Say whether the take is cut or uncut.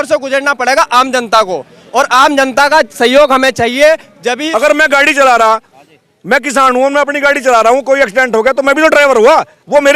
cut